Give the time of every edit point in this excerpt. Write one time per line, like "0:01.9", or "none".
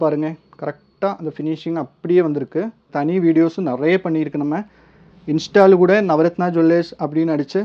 0:02.9